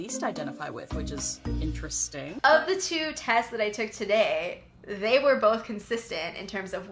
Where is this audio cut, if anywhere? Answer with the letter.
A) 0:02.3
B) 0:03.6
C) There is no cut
A